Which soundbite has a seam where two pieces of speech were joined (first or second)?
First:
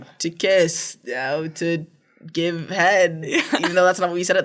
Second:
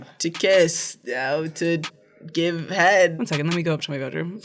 second